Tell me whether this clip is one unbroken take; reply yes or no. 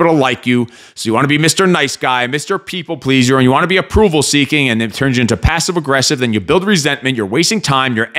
yes